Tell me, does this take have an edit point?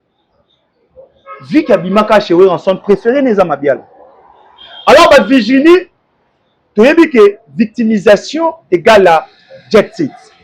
no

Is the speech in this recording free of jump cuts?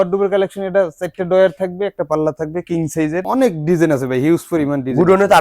no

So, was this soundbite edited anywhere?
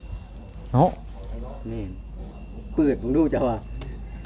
no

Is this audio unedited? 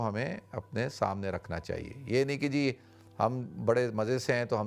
yes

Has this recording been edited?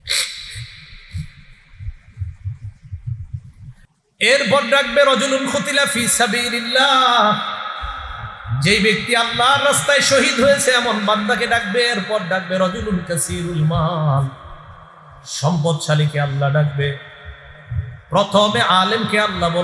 yes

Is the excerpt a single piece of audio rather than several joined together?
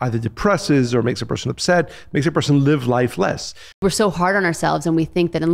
no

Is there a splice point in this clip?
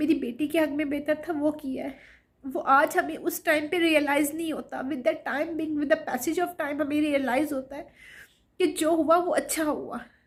no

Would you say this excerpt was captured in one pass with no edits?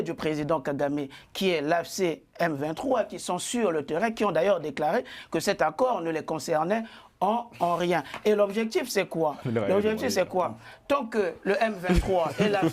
yes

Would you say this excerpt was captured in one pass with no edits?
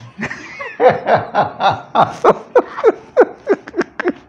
yes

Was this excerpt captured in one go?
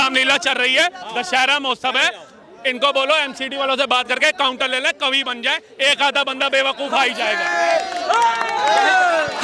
yes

